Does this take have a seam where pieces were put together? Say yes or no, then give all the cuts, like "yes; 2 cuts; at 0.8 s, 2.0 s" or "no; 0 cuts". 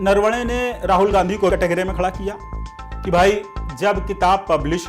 yes; 1 cut; at 1.5 s